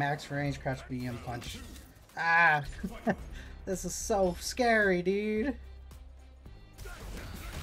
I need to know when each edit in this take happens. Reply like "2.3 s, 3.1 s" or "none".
none